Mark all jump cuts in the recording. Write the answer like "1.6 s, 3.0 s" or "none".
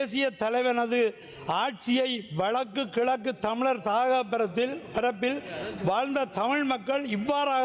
none